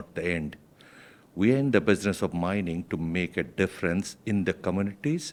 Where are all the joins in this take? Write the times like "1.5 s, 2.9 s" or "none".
none